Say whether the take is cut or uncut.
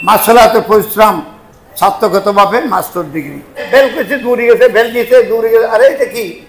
cut